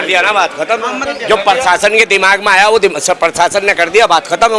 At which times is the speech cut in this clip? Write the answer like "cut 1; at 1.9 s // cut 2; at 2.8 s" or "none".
cut 1; at 1.0 s